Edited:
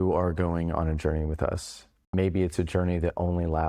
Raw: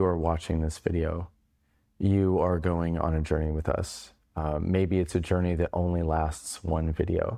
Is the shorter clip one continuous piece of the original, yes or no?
no